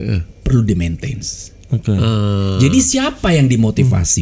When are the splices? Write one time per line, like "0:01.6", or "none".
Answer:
none